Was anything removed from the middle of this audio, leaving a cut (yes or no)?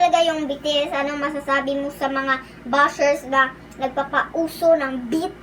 no